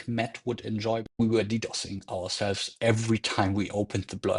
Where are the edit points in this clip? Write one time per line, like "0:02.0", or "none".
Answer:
0:01.1